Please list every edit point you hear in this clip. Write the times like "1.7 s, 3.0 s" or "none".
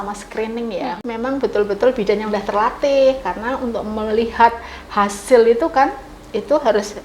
1.0 s